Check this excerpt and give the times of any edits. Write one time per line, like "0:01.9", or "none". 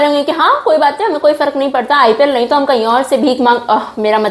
none